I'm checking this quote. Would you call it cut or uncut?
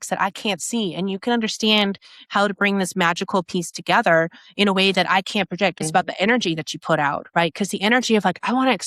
cut